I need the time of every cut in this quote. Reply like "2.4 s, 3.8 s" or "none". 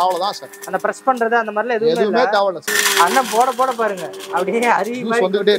2.6 s

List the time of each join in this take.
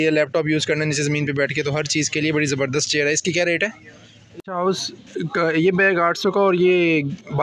4.4 s

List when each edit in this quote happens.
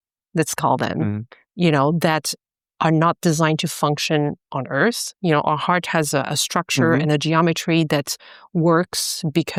none

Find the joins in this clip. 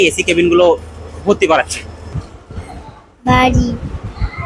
2.2 s

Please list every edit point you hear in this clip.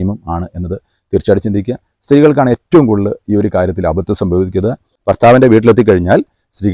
4.9 s

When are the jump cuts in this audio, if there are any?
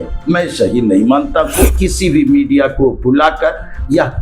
1.8 s

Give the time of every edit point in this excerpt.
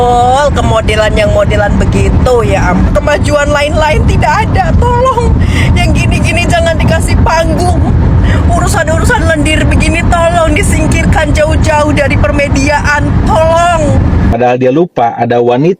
2.9 s, 14.3 s

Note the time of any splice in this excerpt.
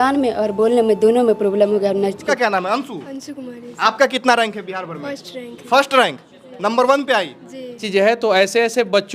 2.3 s, 7.8 s

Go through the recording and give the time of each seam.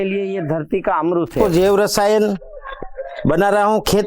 1.3 s

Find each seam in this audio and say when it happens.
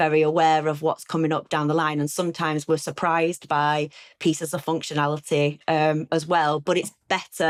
none

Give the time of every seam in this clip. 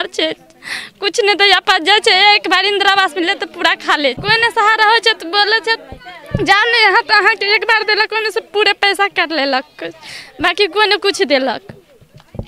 4.2 s

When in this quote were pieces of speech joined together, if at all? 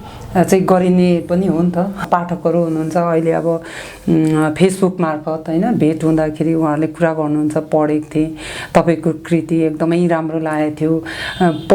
2.0 s

